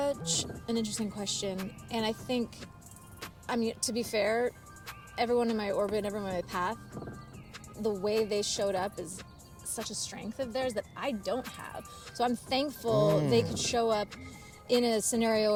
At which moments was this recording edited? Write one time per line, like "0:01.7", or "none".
none